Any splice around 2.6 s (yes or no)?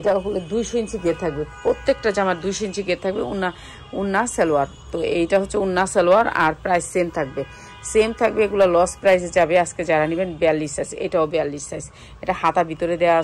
no